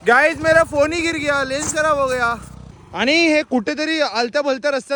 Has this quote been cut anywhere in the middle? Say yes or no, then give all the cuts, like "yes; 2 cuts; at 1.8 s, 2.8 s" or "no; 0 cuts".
no; 0 cuts